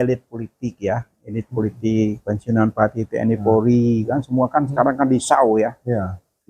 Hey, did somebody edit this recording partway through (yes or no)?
no